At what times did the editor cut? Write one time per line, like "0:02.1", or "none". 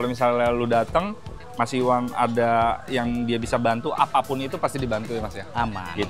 none